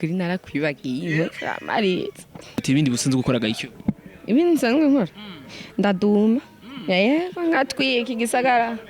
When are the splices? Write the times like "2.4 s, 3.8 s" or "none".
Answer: 2.6 s